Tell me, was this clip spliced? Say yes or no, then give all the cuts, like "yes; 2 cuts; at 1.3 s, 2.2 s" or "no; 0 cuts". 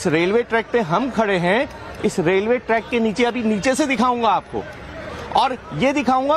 no; 0 cuts